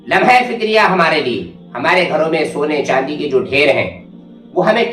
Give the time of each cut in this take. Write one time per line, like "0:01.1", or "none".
none